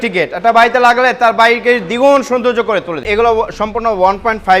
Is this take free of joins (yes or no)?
no